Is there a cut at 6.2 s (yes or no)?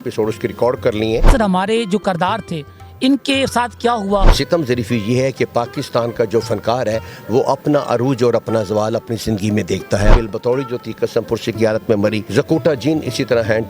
no